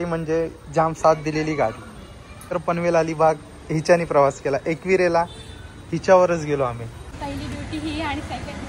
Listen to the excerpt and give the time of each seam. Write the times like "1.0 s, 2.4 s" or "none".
2.6 s, 7.1 s